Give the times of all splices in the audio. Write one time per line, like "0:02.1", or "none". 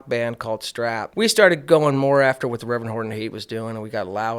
0:01.0